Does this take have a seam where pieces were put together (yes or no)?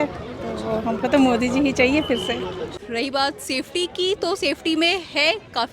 yes